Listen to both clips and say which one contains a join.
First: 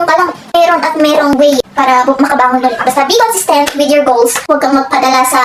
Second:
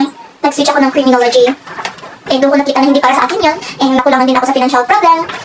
first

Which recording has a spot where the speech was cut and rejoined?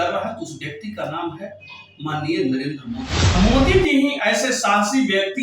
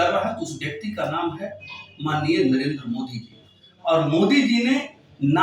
first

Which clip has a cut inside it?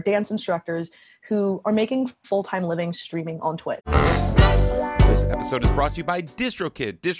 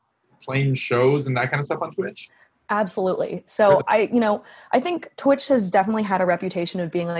first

